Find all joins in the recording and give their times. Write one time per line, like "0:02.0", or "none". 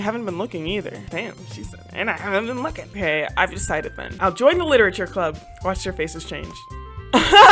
0:01.0
0:02.9
0:04.0